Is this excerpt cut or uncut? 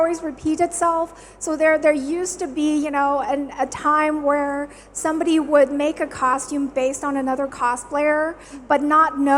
uncut